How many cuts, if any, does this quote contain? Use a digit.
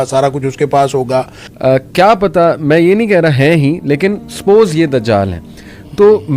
1